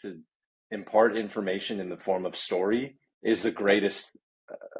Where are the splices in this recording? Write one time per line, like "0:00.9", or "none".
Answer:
none